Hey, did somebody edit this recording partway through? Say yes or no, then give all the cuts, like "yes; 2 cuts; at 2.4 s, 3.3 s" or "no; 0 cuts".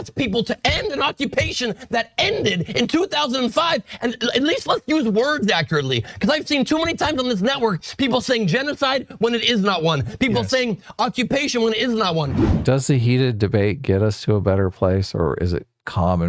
yes; 1 cut; at 12.3 s